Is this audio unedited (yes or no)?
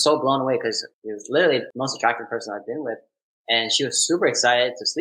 no